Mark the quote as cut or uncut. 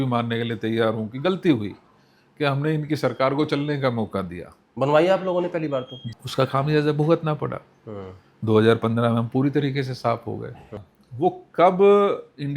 cut